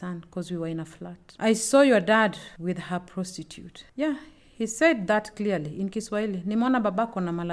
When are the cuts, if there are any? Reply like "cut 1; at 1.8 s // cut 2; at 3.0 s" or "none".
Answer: cut 1; at 2.5 s